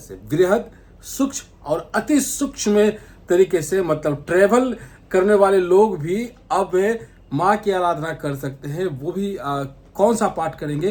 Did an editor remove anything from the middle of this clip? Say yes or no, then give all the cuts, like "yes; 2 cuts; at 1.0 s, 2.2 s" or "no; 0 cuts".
no; 0 cuts